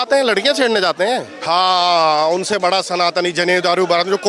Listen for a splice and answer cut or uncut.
cut